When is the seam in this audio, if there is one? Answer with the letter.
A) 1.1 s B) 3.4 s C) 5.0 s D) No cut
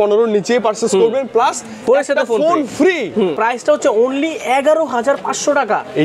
B